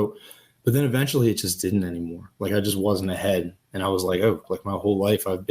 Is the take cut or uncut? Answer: cut